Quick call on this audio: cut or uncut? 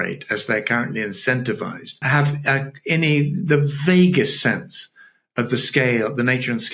cut